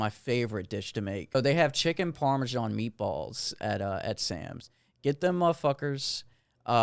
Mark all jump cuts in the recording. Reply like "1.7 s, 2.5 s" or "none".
1.3 s